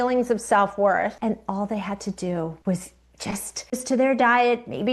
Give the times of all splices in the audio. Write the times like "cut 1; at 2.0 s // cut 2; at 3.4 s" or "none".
cut 1; at 1.2 s // cut 2; at 2.6 s // cut 3; at 3.5 s